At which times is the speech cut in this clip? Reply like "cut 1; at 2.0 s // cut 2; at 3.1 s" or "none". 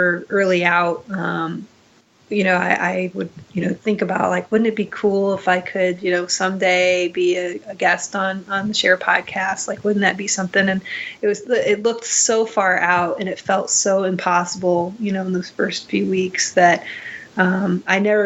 none